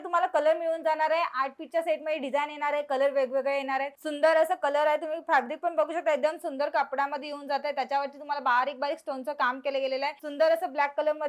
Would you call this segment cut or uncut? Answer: cut